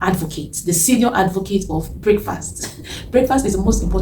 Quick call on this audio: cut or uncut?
uncut